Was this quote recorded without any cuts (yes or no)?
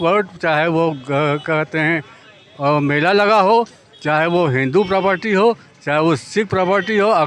yes